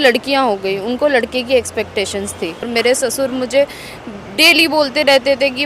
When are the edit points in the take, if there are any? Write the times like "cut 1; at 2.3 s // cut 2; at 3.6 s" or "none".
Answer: cut 1; at 2.7 s